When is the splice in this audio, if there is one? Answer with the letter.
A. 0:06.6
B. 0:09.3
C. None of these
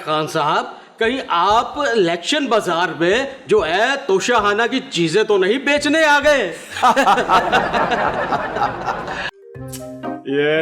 B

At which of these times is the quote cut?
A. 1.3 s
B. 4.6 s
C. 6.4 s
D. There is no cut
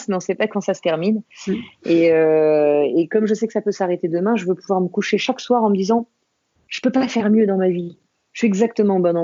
D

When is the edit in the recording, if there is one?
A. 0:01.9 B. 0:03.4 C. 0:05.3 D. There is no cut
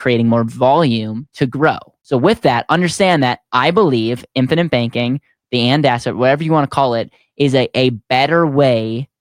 A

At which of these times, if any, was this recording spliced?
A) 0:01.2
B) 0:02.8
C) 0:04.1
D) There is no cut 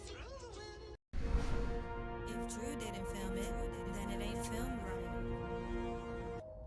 A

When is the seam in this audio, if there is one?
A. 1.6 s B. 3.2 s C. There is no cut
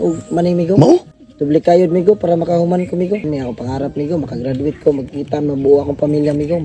B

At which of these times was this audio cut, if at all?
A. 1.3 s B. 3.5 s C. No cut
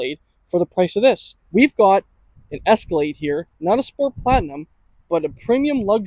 A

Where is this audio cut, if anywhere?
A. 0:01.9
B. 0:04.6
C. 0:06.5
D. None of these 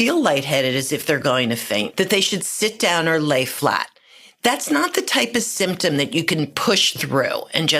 A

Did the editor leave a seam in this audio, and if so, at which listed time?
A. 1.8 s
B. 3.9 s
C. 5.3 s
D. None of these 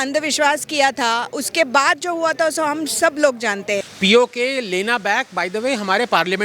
B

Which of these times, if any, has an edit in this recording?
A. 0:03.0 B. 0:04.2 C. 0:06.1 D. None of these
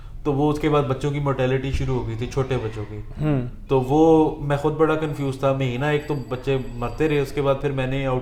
D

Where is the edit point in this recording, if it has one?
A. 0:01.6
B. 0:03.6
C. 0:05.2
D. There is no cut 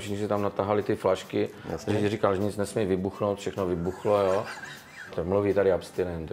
C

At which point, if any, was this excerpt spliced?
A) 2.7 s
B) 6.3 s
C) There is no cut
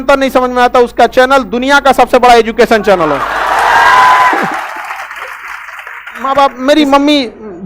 B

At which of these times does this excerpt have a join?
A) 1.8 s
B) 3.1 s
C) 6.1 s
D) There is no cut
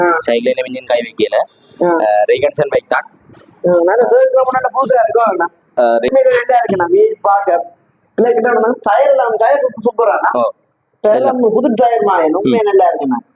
C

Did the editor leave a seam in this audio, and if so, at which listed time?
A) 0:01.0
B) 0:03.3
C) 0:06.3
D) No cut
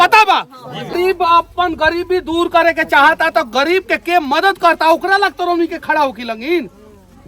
A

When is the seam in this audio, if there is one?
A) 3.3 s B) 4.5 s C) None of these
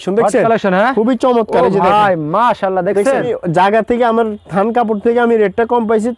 A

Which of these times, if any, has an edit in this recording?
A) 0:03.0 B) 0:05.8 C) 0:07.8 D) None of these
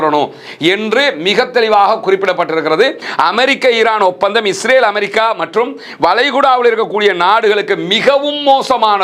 A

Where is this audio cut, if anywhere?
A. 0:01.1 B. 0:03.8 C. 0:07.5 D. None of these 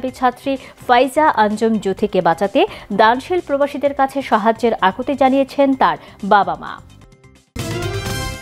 C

